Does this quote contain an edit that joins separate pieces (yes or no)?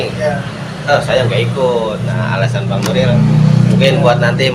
no